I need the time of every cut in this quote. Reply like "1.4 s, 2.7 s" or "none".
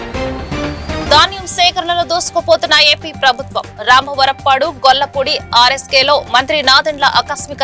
none